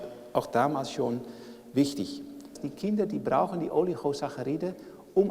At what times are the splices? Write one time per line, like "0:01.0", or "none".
0:02.6